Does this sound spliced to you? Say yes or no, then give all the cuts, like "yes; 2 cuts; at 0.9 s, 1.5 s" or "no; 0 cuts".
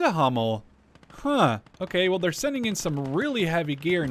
yes; 1 cut; at 1.7 s